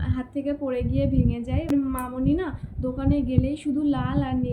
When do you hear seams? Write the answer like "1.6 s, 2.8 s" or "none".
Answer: 1.7 s